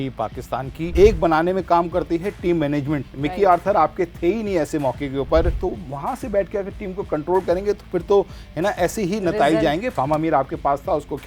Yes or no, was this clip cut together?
yes